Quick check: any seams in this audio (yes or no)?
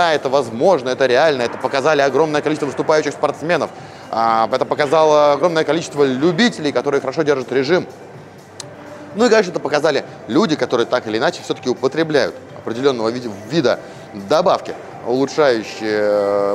no